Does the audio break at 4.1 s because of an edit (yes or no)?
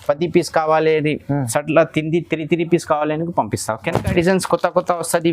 yes